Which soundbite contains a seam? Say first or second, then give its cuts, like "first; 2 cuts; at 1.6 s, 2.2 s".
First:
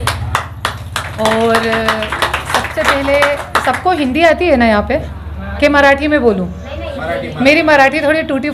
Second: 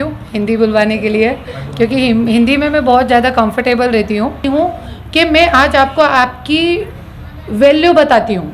second; 1 cut; at 4.4 s